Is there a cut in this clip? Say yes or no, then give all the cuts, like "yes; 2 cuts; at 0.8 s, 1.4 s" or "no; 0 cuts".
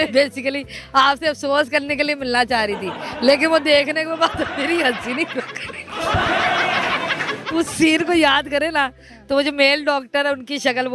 no; 0 cuts